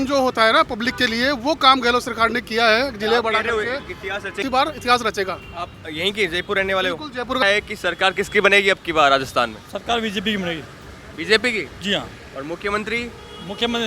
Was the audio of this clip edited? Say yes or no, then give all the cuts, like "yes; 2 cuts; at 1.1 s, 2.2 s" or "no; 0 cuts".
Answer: yes; 2 cuts; at 4.4 s, 7.4 s